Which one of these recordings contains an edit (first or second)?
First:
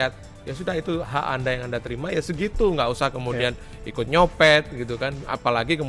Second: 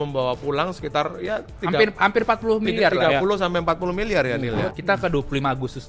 second